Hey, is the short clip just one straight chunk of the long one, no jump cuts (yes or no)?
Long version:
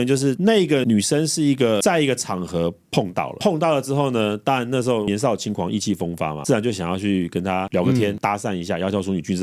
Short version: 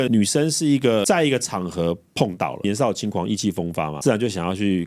no